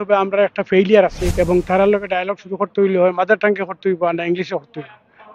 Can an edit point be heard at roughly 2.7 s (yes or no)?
no